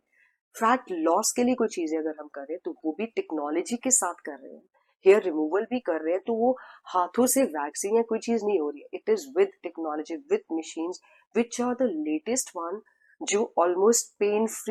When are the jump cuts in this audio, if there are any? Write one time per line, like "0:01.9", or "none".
none